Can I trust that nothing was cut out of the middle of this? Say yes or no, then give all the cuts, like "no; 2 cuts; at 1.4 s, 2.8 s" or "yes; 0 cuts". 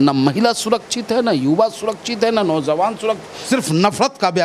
no; 1 cut; at 3.3 s